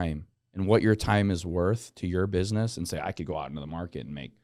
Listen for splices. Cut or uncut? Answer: uncut